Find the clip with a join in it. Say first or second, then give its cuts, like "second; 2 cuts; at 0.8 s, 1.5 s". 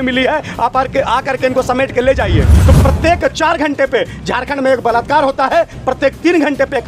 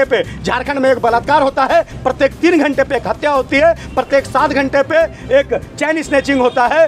first; 1 cut; at 2.6 s